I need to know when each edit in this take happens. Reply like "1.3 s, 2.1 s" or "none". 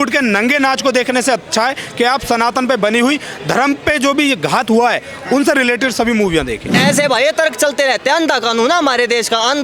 6.8 s

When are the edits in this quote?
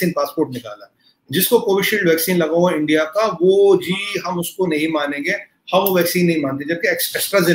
none

